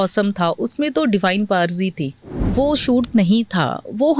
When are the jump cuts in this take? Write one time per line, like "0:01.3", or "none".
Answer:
0:02.4